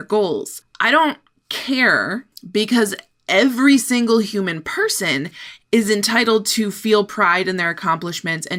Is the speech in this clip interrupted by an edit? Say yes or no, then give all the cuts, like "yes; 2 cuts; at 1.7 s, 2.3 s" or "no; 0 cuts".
no; 0 cuts